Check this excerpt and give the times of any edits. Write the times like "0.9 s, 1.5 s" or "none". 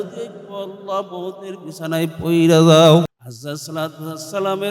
3.1 s

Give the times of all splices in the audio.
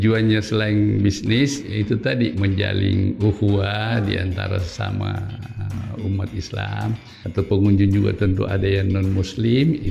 7.1 s

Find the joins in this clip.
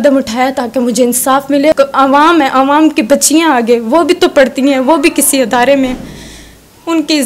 1.7 s

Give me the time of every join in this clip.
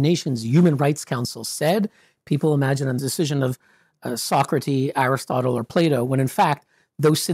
3.0 s

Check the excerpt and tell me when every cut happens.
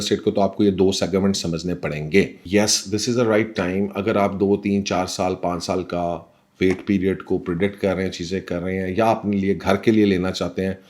2.4 s

